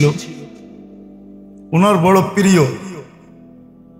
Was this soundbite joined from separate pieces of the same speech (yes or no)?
yes